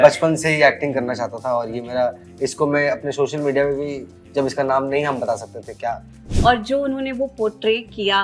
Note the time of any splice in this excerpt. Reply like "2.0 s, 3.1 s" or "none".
6.2 s

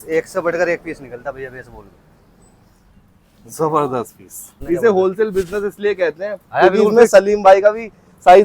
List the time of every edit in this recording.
4.6 s

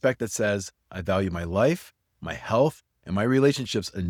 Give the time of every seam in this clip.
none

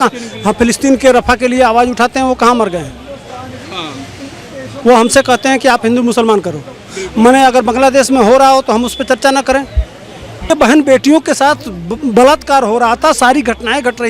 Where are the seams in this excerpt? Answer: 10.5 s

